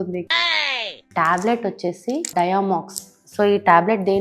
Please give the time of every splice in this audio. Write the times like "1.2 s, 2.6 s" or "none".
1.1 s, 2.3 s